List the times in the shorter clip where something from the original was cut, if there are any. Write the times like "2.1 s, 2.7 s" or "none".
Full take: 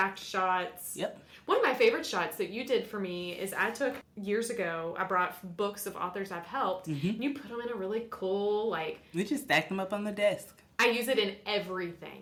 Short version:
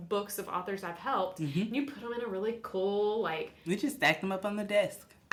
none